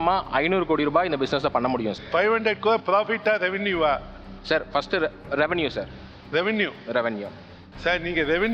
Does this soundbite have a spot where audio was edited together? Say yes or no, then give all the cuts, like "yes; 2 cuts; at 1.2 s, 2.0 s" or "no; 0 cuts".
no; 0 cuts